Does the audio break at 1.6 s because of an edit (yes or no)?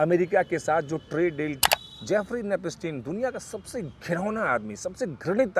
yes